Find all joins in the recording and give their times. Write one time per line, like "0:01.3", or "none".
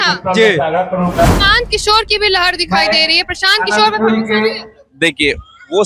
0:01.2